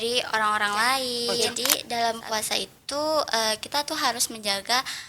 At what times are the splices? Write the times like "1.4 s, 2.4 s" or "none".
1.4 s

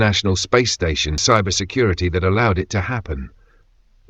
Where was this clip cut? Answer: 1.2 s

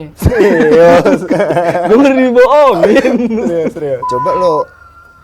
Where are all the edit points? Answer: 4.1 s

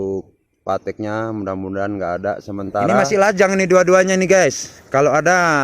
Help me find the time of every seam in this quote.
3.0 s

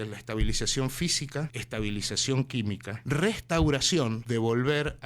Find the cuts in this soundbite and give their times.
1.6 s, 2.9 s, 4.2 s

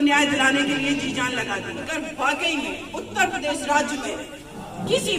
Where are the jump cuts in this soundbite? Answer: 1.8 s

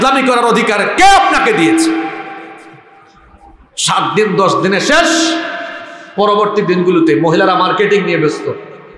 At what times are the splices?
none

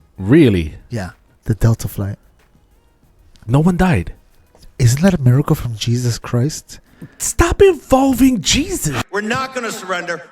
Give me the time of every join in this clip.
1.3 s, 8.9 s

